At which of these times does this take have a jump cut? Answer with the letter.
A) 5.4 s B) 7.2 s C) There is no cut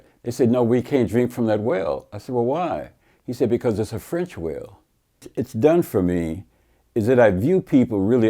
A